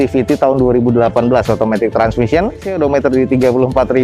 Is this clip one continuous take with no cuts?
no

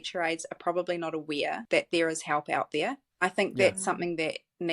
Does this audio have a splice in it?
yes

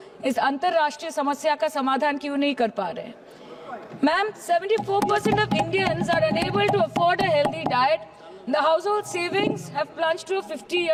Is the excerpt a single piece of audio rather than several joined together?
yes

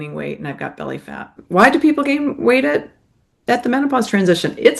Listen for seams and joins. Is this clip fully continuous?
no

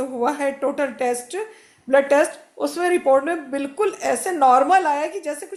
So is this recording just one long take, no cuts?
yes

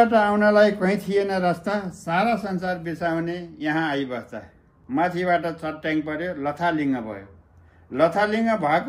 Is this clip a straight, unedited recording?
no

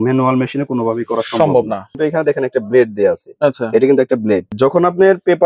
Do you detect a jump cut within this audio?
yes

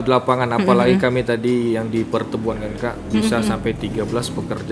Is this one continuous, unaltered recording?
yes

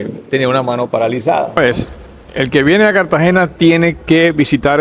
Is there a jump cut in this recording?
yes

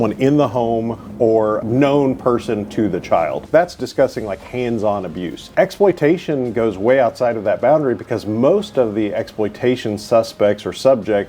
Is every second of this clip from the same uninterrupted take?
no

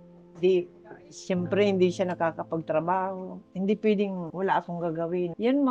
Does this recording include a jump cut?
yes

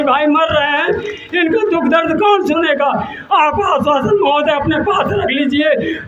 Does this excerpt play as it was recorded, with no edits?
yes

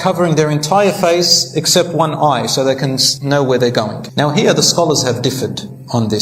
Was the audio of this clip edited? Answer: yes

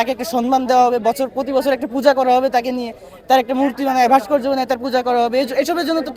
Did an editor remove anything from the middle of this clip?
no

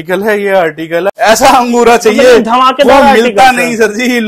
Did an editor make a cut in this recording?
yes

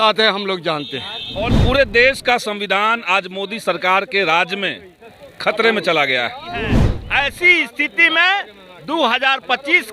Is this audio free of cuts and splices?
no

